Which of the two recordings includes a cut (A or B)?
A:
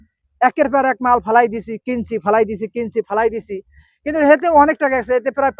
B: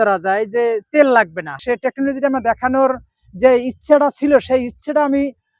B